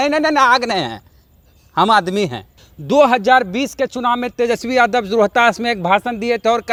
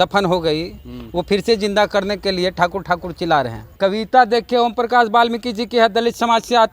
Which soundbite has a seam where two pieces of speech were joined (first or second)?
second